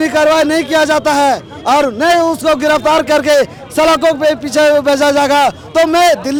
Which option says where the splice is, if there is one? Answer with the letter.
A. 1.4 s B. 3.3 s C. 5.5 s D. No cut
D